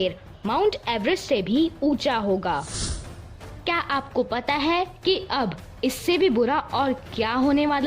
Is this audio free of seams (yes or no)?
no